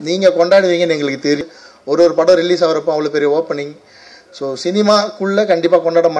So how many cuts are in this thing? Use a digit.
1